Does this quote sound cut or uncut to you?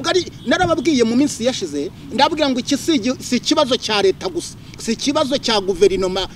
uncut